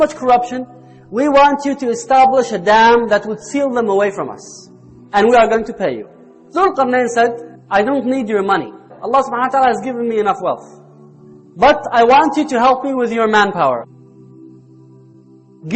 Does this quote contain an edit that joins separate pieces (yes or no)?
no